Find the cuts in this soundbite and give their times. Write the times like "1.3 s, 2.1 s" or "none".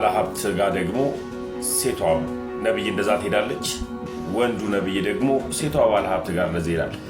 none